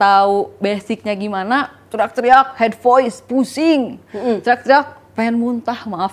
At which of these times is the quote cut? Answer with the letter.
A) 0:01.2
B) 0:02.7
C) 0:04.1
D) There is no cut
D